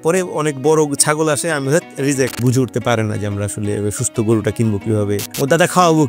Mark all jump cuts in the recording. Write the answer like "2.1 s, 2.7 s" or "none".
2.4 s, 5.3 s